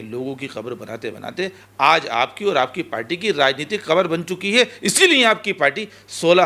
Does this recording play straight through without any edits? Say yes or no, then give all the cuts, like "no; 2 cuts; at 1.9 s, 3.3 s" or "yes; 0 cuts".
yes; 0 cuts